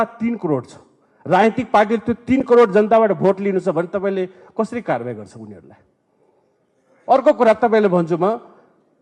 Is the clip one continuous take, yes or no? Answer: yes